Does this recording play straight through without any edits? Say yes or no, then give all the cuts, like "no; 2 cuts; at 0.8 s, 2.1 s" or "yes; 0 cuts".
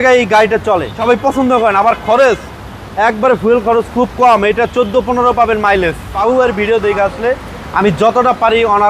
no; 2 cuts; at 1.0 s, 6.2 s